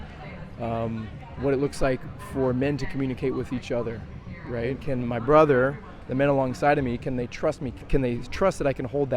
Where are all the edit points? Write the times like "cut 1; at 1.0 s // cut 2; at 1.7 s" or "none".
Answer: cut 1; at 4.8 s // cut 2; at 7.7 s